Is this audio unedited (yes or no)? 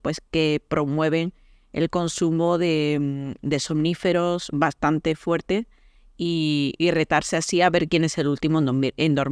yes